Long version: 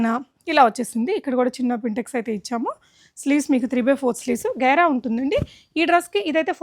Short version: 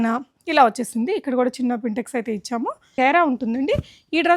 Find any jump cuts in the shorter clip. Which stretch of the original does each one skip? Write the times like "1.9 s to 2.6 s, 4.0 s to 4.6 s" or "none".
2.9 s to 4.5 s